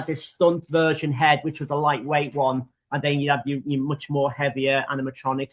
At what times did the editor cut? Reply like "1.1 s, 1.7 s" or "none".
none